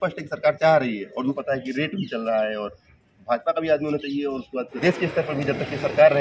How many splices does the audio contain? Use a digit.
2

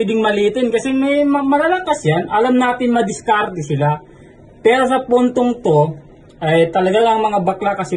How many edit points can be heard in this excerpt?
0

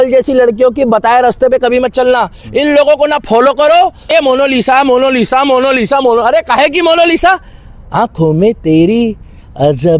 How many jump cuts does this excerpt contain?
1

